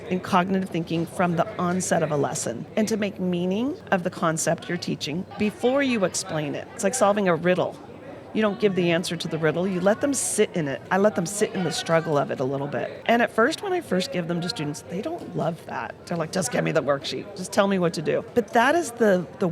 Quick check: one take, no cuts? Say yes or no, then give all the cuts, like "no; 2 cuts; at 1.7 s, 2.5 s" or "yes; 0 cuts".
no; 8 cuts; at 2.6 s, 3.8 s, 5.3 s, 6.7 s, 10.8 s, 12.9 s, 16.0 s, 18.3 s